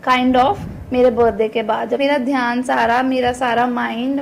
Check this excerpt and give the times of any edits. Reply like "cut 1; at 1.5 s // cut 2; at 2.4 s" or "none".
cut 1; at 2.0 s